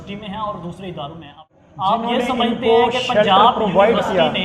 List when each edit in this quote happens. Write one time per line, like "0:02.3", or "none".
0:01.5